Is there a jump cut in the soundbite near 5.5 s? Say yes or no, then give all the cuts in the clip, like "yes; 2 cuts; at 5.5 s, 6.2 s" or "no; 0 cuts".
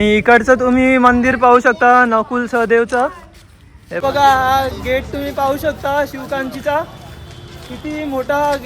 no; 1 cut; at 4.0 s